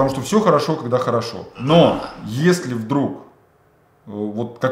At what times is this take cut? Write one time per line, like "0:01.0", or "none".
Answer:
0:01.5